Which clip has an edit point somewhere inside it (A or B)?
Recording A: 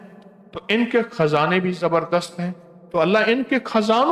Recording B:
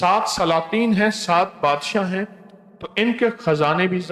A